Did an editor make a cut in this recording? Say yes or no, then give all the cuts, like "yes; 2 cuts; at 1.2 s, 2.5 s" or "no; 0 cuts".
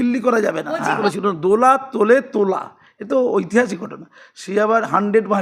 yes; 1 cut; at 1.1 s